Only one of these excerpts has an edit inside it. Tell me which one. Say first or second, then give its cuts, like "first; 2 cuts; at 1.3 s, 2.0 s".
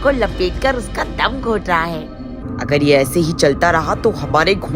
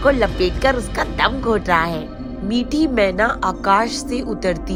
first; 1 cut; at 2.3 s